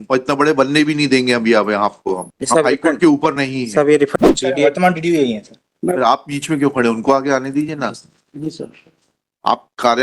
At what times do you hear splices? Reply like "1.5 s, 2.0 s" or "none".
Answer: 4.1 s